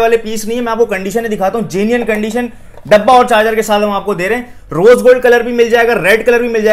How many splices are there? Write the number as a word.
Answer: zero